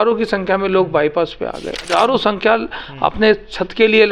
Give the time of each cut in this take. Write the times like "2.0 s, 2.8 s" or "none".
1.9 s